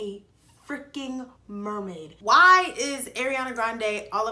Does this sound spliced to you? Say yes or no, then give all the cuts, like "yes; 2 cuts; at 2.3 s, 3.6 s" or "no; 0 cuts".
yes; 1 cut; at 2.1 s